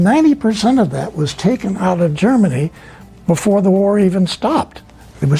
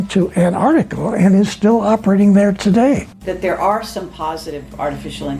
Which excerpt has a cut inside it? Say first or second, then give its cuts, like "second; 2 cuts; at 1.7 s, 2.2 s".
second; 1 cut; at 3.1 s